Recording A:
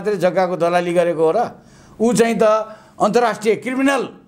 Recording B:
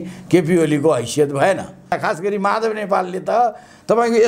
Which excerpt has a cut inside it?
B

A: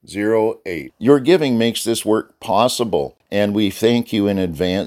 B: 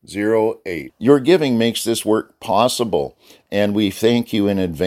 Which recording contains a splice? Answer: A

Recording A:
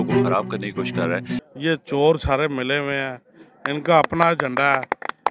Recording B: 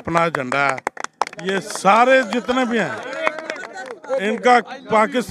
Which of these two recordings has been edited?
A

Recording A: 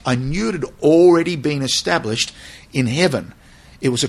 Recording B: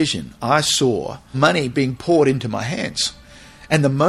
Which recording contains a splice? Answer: B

